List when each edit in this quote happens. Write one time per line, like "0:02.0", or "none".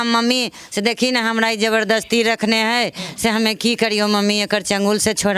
none